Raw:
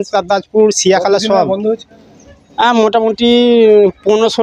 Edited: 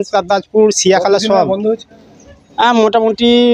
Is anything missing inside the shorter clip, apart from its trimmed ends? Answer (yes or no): no